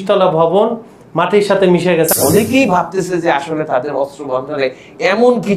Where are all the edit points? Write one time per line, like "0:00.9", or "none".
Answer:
0:02.1